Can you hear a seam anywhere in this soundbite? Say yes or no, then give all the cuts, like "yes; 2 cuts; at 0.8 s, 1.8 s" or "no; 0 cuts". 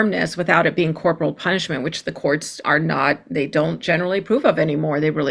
no; 0 cuts